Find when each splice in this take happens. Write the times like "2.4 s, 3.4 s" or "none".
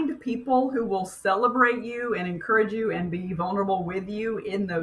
none